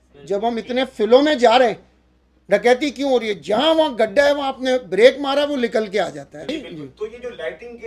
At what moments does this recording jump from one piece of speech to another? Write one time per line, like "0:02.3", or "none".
0:06.5